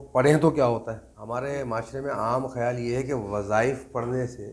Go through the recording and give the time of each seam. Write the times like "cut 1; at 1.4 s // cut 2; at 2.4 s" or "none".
cut 1; at 1.1 s